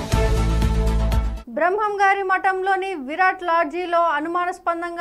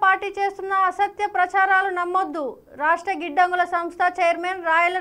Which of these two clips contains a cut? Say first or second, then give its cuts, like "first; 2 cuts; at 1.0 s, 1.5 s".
first; 1 cut; at 1.3 s